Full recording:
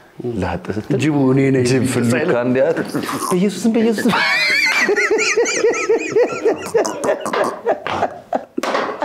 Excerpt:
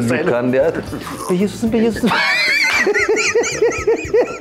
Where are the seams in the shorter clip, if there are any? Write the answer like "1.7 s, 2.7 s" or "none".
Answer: none